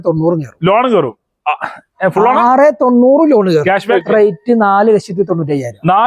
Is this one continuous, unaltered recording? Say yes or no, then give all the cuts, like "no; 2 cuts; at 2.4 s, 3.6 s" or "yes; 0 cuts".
no; 1 cut; at 3.9 s